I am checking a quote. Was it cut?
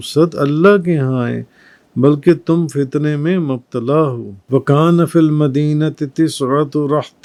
no; 0 cuts

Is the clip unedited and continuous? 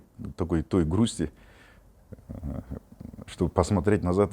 yes; 0 cuts

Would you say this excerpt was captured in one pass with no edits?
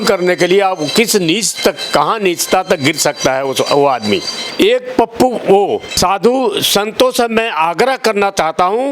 no; 1 cut; at 6.0 s

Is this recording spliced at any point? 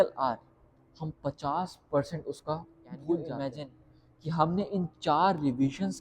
yes; 1 cut; at 3.3 s

